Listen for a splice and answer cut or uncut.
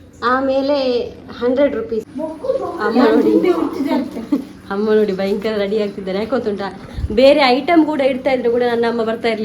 cut